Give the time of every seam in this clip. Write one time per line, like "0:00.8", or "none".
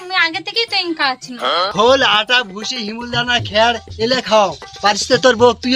0:01.7